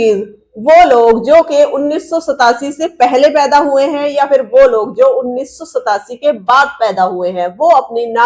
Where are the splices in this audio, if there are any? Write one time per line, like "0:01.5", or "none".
none

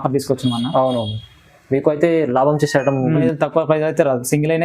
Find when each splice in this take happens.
0:03.3

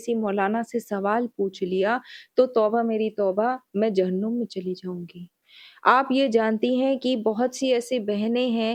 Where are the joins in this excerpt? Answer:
none

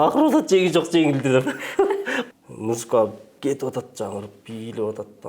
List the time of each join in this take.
0:02.2

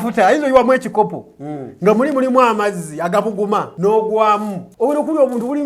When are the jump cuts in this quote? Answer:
0:03.7
0:04.6

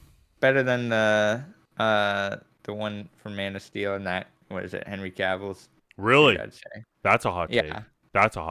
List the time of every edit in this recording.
none

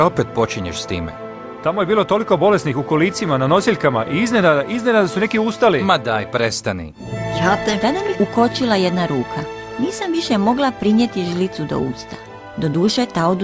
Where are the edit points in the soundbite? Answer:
0:01.0

